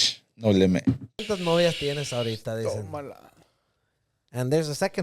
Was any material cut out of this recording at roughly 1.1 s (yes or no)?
yes